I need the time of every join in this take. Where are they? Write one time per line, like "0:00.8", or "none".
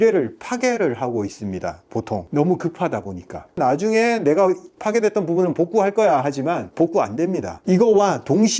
0:03.6
0:06.7
0:07.5